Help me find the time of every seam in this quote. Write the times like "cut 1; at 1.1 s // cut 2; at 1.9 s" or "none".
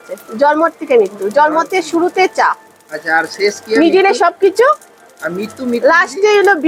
none